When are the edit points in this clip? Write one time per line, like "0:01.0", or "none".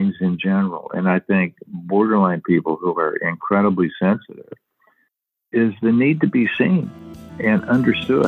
0:07.3